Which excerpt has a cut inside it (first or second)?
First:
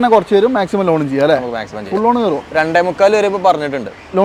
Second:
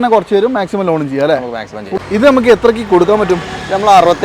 second